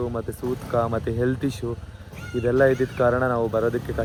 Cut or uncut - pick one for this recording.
uncut